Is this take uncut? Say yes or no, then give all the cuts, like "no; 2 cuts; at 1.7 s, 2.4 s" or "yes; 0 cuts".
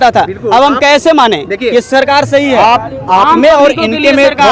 yes; 0 cuts